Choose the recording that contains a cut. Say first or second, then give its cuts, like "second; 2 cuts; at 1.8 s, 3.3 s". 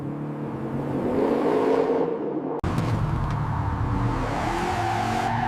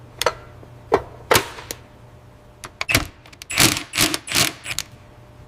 first; 1 cut; at 2.6 s